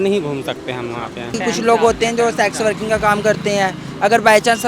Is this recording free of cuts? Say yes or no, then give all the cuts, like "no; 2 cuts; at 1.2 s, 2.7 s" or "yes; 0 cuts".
no; 1 cut; at 1.4 s